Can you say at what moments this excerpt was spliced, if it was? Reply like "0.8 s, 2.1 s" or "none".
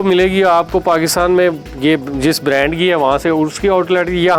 none